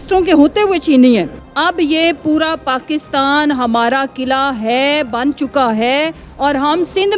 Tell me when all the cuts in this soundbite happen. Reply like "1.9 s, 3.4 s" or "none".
1.3 s

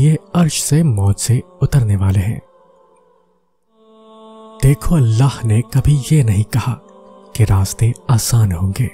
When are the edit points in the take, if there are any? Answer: 2.4 s, 4.0 s

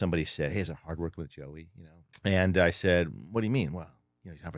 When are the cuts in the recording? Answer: 2.1 s

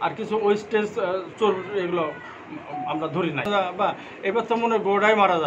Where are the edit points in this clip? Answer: 3.5 s

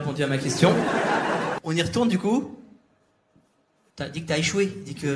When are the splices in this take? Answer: 3.8 s

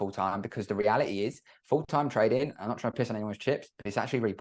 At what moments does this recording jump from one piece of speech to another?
none

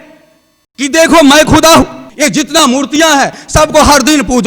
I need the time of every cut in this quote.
2.0 s

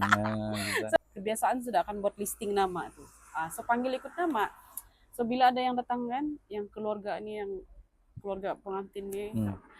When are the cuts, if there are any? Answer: 1.0 s

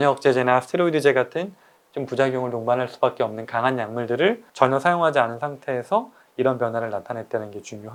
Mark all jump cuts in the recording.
none

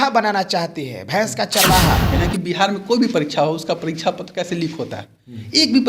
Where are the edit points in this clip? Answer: 2.1 s

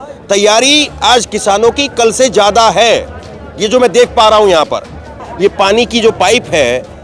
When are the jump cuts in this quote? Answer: 5.2 s

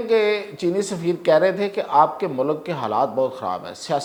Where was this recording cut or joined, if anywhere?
none

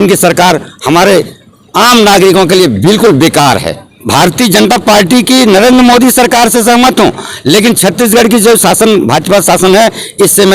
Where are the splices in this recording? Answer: 3.8 s

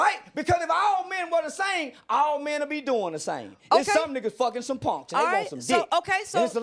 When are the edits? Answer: 5.7 s

